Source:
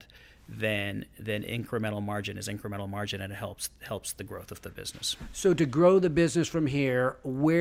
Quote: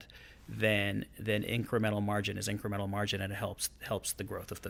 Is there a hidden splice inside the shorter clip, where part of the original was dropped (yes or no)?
no